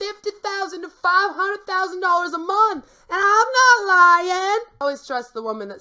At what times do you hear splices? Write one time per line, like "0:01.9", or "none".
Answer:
0:04.8

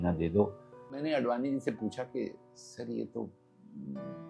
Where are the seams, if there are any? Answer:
0:01.0

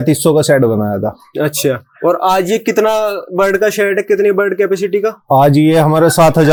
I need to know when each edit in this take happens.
none

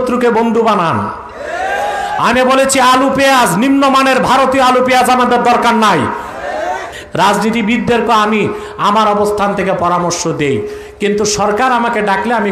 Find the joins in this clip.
0:06.9

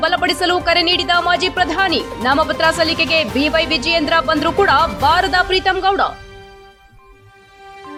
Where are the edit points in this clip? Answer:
none

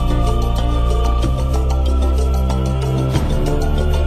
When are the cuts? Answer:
none

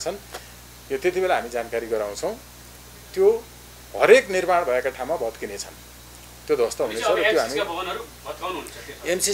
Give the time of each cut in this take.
none

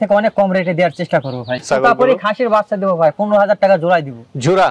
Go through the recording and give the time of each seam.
0:01.6

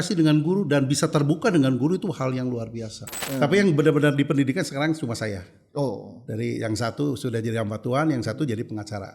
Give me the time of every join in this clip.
0:03.2

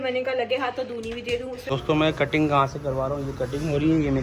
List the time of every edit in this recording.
0:01.6

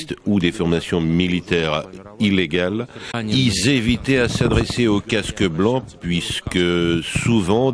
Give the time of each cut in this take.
0:03.2

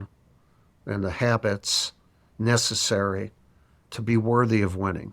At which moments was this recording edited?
0:03.9

